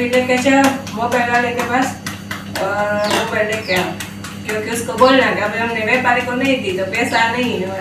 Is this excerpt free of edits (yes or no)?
yes